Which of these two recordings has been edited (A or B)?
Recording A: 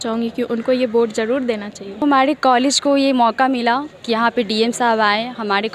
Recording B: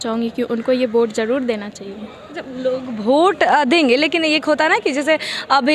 A